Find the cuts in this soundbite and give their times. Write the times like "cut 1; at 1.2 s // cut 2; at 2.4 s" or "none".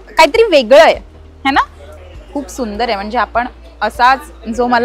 cut 1; at 1.8 s